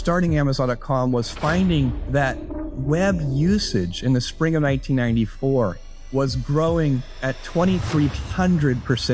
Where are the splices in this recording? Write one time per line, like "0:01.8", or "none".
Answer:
none